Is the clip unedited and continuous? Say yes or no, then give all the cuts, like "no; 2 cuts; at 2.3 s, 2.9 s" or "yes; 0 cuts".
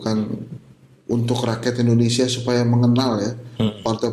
yes; 0 cuts